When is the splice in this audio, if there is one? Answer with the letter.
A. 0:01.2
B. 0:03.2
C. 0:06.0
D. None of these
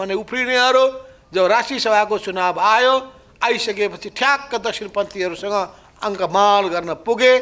D